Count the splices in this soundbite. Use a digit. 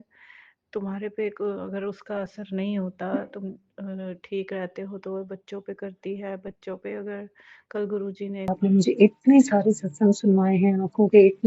1